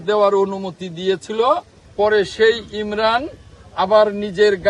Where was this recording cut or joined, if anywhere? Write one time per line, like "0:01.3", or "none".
0:01.8